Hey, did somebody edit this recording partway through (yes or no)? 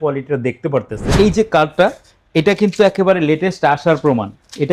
yes